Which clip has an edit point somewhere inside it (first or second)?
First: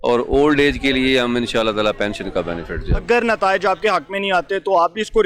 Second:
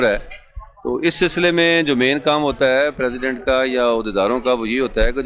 first